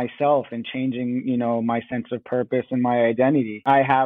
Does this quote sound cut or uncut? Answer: uncut